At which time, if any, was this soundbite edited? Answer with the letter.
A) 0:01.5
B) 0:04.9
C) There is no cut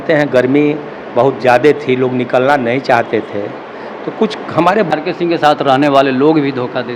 B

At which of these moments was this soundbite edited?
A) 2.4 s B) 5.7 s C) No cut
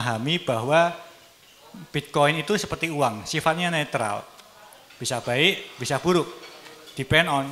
C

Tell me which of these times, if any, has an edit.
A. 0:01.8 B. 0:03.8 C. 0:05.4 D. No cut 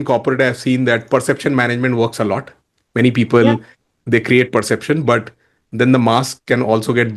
D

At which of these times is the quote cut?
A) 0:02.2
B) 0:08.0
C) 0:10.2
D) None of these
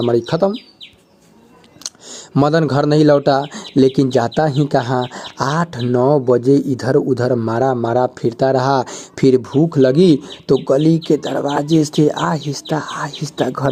D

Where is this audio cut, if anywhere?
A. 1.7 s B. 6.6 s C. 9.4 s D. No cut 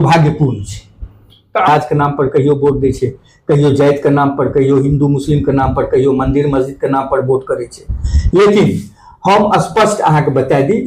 A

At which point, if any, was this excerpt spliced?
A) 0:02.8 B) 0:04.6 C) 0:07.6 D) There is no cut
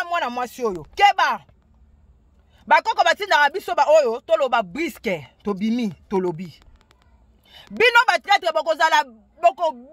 D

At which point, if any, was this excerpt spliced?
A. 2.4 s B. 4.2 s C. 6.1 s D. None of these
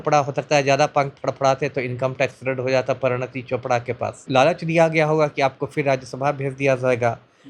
B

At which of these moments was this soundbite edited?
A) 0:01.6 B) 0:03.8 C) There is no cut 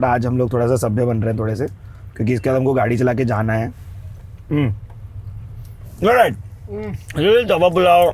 B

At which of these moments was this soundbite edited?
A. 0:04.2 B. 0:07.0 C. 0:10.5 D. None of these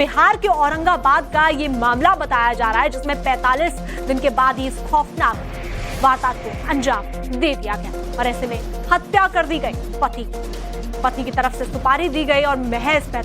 A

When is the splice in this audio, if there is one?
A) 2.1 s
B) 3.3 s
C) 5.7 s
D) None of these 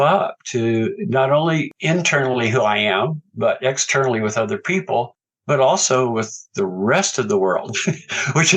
D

